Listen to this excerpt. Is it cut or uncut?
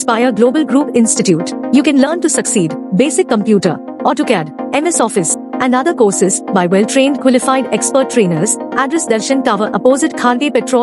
uncut